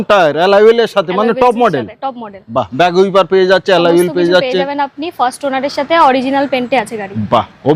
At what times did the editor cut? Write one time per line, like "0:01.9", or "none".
none